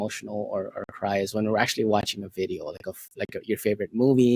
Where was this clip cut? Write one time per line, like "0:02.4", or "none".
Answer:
none